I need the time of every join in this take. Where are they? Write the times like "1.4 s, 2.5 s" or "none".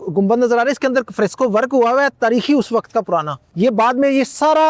3.4 s